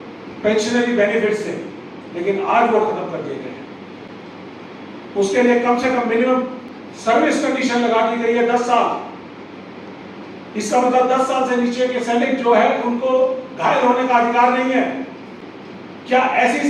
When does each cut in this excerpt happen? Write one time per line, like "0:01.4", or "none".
none